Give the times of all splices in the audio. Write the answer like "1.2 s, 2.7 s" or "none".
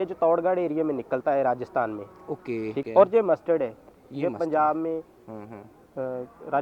2.8 s